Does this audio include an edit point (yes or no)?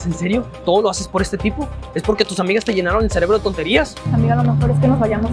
no